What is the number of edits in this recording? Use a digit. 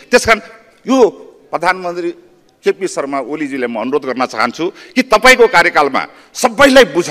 0